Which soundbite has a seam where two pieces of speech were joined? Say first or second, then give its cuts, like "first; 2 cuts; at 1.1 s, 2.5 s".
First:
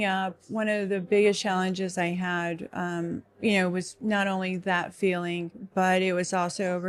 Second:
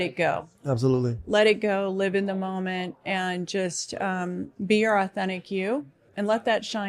second; 1 cut; at 6.0 s